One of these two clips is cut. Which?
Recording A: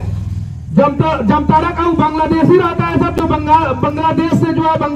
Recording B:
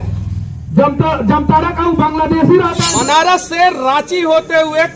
B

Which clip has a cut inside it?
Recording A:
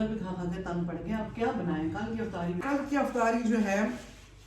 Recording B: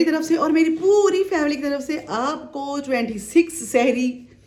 A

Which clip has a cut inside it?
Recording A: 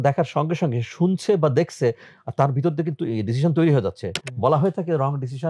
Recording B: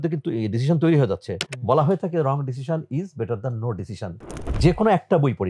B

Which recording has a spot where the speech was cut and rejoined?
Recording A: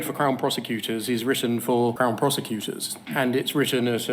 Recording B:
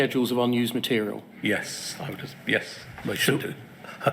A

